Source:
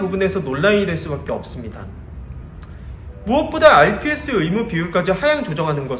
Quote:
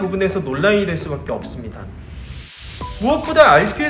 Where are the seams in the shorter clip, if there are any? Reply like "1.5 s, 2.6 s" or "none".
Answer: 2.6 s